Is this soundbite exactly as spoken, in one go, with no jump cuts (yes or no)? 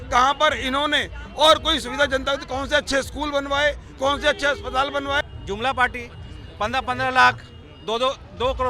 no